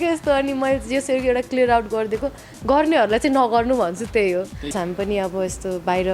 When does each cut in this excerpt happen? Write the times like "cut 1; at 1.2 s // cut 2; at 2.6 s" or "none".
cut 1; at 4.7 s